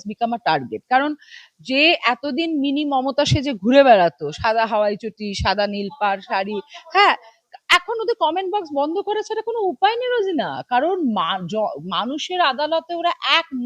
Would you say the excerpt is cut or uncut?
uncut